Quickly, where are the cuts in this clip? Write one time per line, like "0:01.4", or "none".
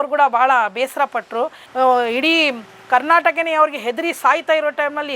0:01.6